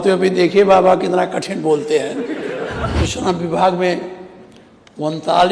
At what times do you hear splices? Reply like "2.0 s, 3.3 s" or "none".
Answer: 2.9 s